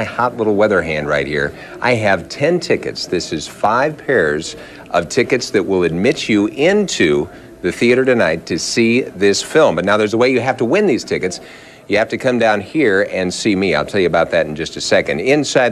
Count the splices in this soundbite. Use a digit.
1